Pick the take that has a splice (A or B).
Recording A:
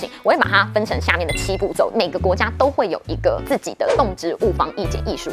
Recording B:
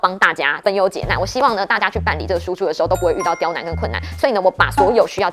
A